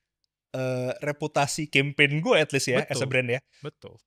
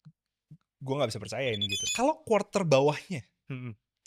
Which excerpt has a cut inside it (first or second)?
second